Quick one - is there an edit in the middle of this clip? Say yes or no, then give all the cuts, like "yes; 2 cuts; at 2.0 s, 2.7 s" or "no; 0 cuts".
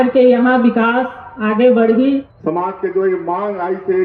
yes; 1 cut; at 2.1 s